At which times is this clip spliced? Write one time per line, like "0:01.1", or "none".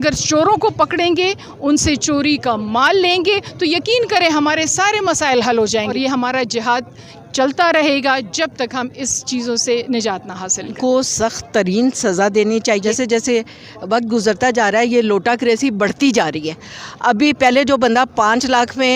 0:05.9
0:10.8
0:12.8